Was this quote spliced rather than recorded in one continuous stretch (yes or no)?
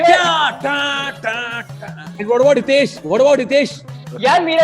yes